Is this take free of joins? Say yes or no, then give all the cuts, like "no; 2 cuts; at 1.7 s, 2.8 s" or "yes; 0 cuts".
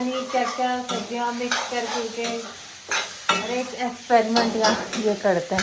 yes; 0 cuts